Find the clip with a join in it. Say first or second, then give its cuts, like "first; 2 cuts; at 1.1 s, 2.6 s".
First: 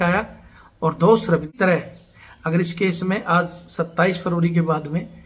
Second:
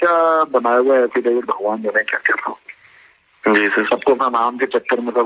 first; 1 cut; at 1.5 s